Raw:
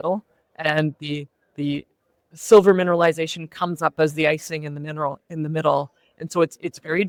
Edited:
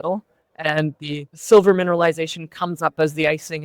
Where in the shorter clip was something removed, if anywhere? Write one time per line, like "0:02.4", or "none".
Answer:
0:01.3

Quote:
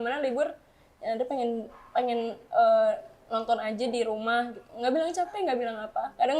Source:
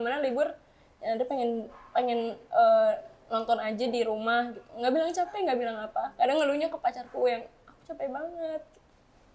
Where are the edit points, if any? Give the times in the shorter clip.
none

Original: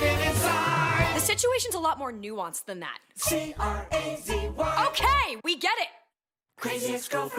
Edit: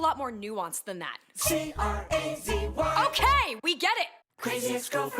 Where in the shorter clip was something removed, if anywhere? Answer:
0:04.2

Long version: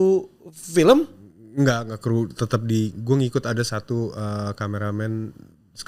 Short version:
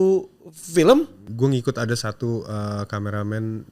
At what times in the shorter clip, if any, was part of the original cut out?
0:01.3

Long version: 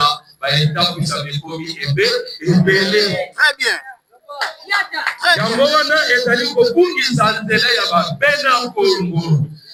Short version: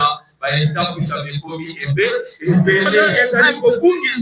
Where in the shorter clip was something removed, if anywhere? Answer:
0:03.2

